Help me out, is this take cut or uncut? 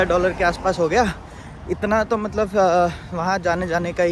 uncut